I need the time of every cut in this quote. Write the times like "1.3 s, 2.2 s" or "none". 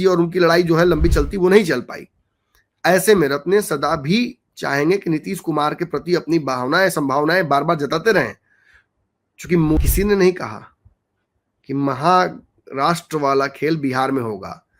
9.8 s

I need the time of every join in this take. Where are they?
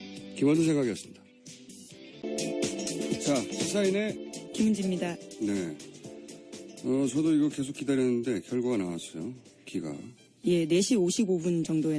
6.4 s

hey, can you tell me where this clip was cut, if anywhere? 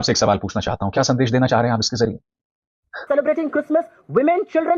3.0 s

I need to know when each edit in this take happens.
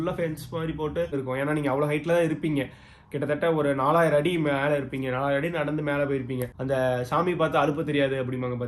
1.1 s, 6.5 s

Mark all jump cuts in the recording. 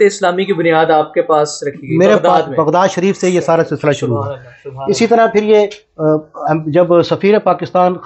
none

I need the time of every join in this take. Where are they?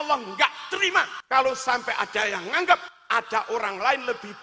1.2 s, 2.9 s

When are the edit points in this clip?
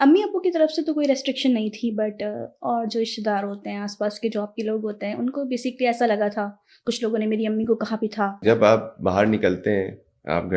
8.4 s

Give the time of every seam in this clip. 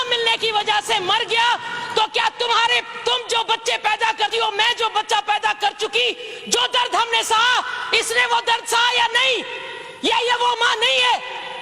none

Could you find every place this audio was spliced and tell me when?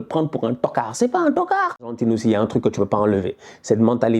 2.0 s

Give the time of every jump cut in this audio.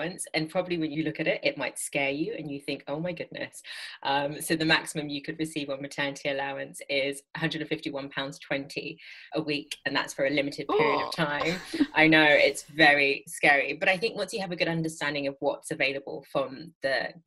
0.9 s, 7.2 s, 9.2 s

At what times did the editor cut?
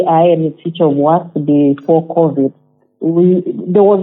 none

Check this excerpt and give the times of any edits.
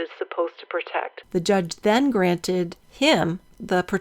1.2 s

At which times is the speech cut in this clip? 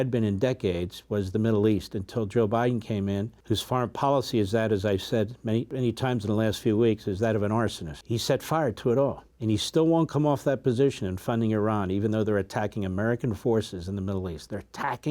3.3 s, 5.7 s, 7.9 s, 9.3 s

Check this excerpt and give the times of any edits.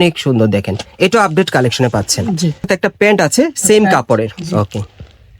2.7 s

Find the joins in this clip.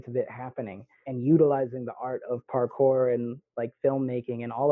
1.0 s

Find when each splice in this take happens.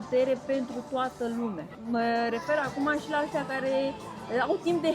1.7 s

